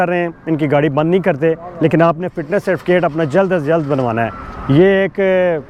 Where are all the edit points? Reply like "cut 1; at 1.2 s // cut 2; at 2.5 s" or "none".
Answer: none